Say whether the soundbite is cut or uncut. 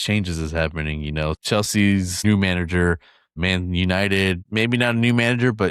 cut